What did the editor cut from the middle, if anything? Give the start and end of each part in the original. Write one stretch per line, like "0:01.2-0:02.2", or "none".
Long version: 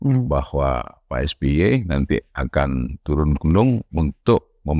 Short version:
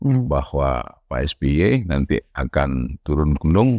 none